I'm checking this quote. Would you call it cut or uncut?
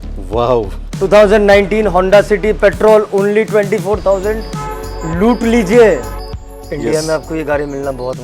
cut